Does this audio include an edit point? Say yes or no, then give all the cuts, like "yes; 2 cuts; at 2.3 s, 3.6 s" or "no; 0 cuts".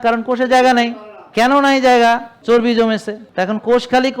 yes; 3 cuts; at 1.3 s, 2.3 s, 3.2 s